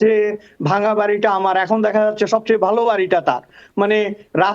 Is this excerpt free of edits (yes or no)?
yes